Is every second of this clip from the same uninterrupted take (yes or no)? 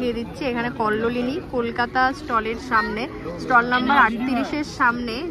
yes